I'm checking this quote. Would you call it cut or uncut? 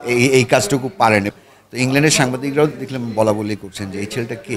cut